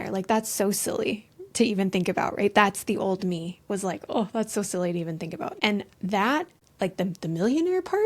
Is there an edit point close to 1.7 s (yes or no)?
no